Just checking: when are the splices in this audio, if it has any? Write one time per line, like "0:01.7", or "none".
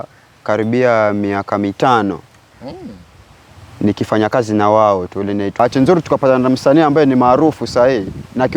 0:05.6